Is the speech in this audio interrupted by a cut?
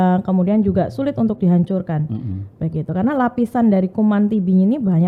no; 0 cuts

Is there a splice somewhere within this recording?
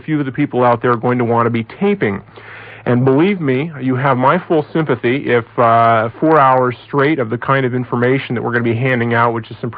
yes; 1 cut; at 3.4 s

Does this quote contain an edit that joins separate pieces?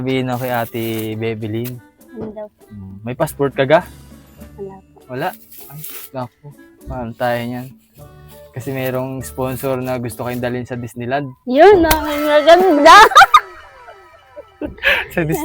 no; 0 cuts

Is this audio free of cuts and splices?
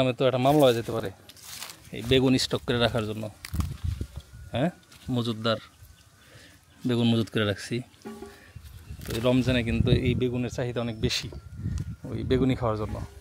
yes; 0 cuts

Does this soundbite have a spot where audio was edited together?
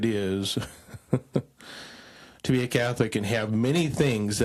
no; 0 cuts

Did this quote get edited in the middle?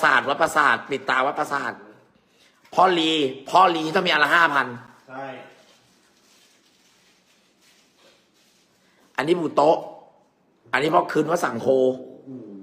no; 0 cuts

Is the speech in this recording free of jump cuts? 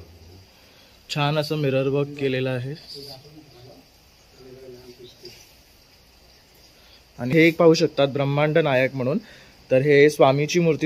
no; 1 cut; at 7.3 s

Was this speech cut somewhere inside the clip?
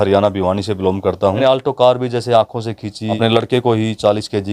yes; 2 cuts; at 1.4 s, 3.2 s

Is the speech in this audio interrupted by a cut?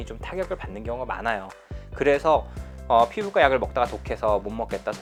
no; 0 cuts

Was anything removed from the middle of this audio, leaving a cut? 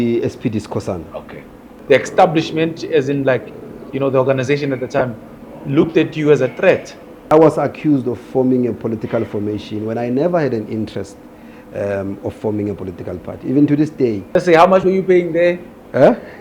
yes; 3 cuts; at 1.7 s, 7.2 s, 14.3 s

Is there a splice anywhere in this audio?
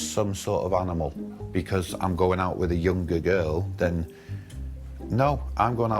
no; 0 cuts

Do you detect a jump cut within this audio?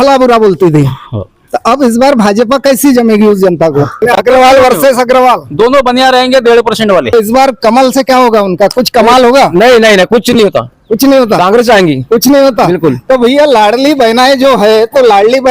yes; 2 cuts; at 4.0 s, 7.1 s

